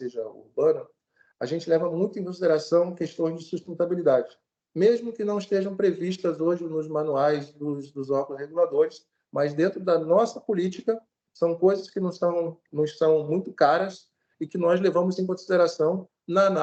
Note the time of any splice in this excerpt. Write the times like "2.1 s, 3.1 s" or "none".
none